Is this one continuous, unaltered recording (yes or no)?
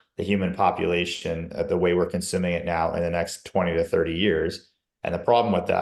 yes